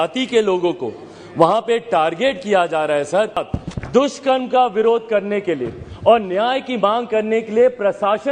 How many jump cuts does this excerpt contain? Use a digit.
1